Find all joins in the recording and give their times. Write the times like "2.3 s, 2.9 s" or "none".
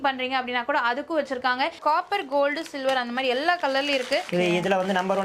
1.8 s, 4.3 s